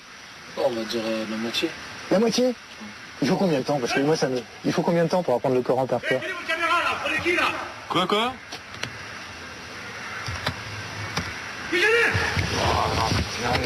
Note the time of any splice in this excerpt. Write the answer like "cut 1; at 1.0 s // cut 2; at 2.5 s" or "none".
none